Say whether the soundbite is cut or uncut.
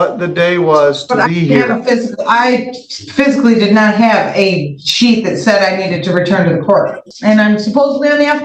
cut